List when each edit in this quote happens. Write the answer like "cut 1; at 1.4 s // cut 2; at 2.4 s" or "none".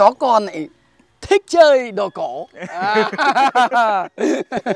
none